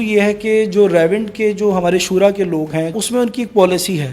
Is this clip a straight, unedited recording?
no; 1 cut; at 2.9 s

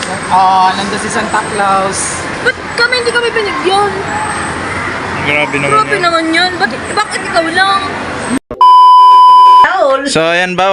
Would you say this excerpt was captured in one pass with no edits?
no; 2 cuts; at 8.4 s, 9.7 s

